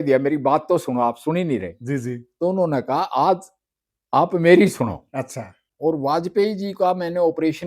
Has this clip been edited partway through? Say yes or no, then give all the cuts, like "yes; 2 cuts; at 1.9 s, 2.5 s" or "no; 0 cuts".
yes; 1 cut; at 5.6 s